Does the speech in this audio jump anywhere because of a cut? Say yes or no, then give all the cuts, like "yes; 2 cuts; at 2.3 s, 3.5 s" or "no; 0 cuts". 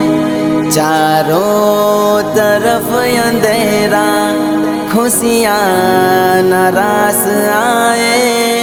no; 0 cuts